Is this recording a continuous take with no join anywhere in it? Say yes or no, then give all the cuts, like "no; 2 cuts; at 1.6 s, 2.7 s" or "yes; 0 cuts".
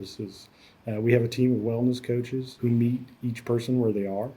yes; 0 cuts